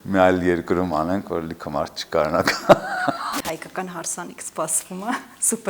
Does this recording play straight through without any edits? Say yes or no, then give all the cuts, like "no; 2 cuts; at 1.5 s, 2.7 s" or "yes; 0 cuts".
no; 1 cut; at 3.2 s